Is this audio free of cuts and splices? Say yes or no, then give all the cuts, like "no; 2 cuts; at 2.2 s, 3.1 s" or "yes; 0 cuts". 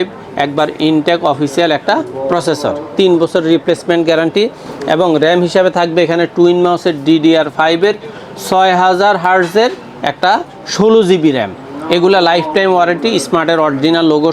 yes; 0 cuts